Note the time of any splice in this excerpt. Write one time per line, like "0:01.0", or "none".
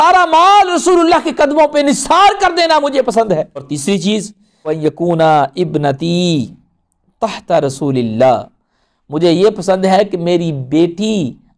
0:03.6
0:04.7